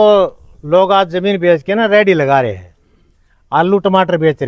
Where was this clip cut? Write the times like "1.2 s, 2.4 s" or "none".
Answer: none